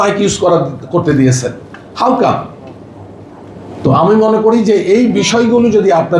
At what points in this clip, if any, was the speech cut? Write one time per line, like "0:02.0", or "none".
none